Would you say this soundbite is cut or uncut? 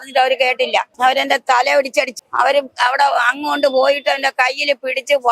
cut